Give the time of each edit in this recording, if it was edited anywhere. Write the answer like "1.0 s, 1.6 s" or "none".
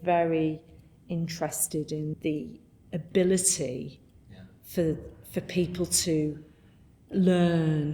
2.1 s, 7.1 s